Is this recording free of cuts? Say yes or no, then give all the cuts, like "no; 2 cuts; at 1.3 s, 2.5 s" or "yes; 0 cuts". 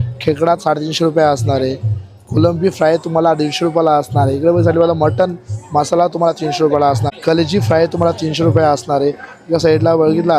no; 1 cut; at 7.0 s